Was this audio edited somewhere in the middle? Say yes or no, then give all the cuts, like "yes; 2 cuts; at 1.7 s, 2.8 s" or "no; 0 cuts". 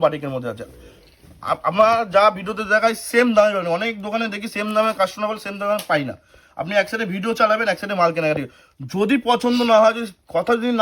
no; 0 cuts